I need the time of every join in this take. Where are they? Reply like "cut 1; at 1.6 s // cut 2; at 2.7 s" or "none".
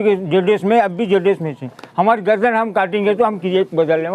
none

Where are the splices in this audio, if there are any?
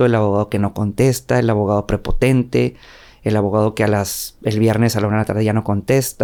none

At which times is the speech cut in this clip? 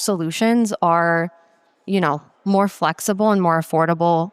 none

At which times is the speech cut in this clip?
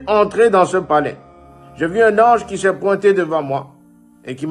none

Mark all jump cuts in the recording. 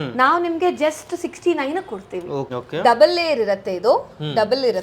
cut 1; at 2.5 s

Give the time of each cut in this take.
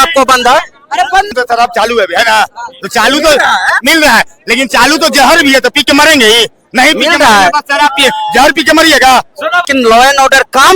cut 1; at 1.3 s // cut 2; at 9.7 s

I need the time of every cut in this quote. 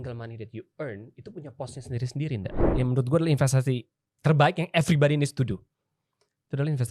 cut 1; at 2.6 s

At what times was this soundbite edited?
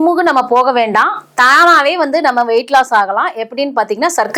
none

